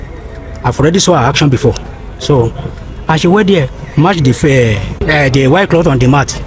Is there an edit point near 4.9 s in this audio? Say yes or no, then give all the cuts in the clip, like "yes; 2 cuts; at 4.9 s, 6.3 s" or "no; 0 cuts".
yes; 1 cut; at 4.9 s